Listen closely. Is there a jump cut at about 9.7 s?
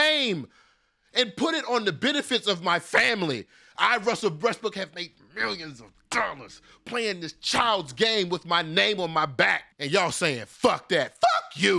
yes; 1 cut; at 9.7 s

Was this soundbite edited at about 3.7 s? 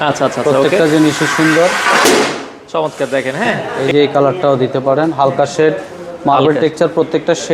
yes; 1 cut; at 3.7 s

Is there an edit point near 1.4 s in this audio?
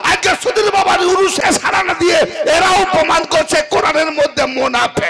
yes; 1 cut; at 1.4 s

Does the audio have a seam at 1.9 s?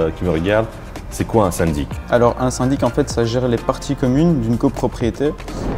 yes; 1 cut; at 1.9 s

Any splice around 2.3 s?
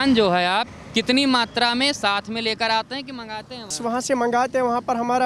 no; 1 cut; at 3.8 s

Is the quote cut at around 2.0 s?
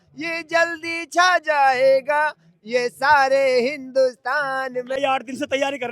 no; 1 cut; at 5.0 s

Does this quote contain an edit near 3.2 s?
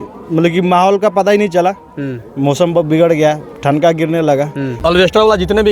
no; 1 cut; at 4.8 s

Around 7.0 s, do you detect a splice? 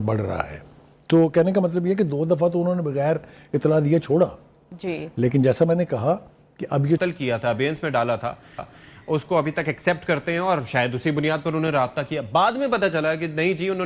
yes; 1 cut; at 7.0 s

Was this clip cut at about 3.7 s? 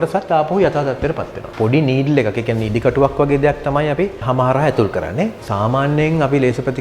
no; 2 cuts; at 1.4 s, 5.4 s

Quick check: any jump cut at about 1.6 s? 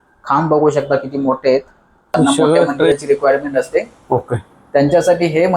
no; 1 cut; at 2.9 s

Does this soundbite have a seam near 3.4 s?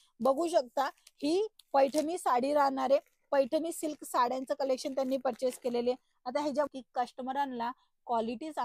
no; 1 cut; at 6.7 s

